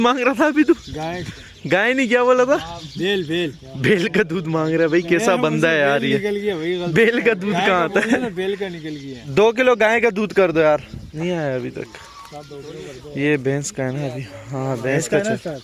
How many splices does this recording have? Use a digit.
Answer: 0